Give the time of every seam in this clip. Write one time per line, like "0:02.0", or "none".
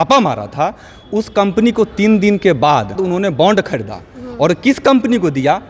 0:03.0